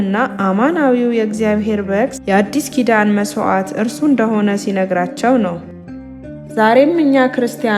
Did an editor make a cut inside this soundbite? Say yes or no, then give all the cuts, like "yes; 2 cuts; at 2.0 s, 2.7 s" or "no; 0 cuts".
yes; 2 cuts; at 2.2 s, 5.8 s